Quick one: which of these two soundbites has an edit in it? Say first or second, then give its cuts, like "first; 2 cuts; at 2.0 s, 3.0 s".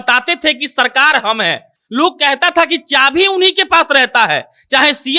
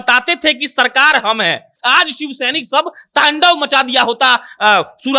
second; 1 cut; at 1.7 s